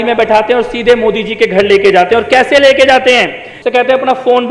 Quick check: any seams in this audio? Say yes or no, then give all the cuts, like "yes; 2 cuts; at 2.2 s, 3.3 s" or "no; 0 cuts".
yes; 1 cut; at 3.2 s